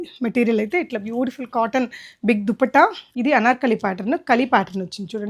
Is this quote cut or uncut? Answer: cut